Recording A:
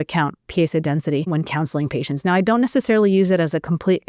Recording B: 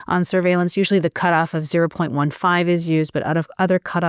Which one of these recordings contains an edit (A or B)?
A